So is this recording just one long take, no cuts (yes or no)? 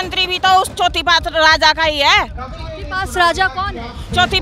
yes